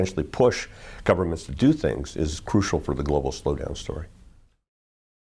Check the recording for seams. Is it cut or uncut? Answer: uncut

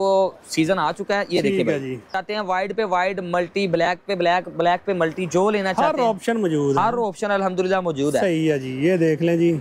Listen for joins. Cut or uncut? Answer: cut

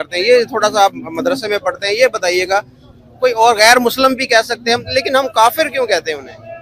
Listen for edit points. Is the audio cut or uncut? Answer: uncut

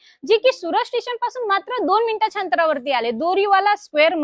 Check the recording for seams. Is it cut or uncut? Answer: uncut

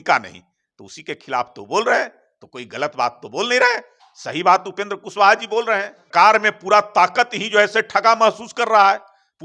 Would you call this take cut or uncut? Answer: cut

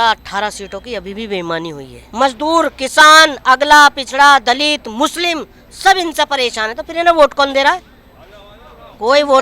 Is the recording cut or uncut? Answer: cut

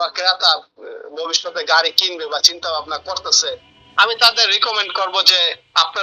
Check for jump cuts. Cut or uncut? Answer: uncut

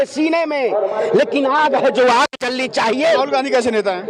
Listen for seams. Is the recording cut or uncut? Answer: cut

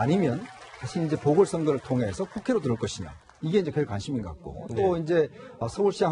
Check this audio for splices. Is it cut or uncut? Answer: uncut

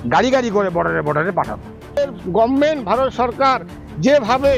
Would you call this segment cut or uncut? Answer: cut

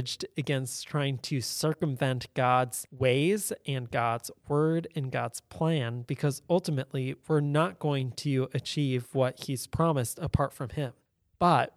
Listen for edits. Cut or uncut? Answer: cut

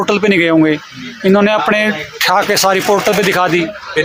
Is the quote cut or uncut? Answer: uncut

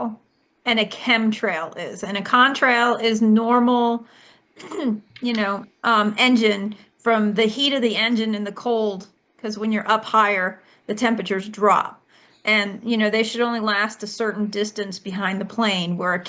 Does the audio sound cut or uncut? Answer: uncut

